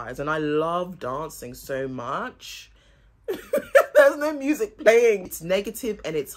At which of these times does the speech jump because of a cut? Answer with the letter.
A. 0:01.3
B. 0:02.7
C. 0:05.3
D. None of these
C